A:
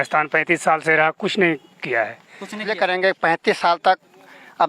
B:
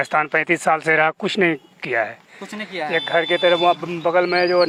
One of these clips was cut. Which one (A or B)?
A